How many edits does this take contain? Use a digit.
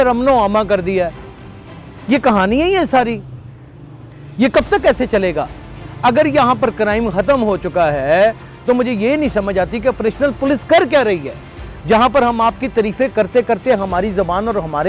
0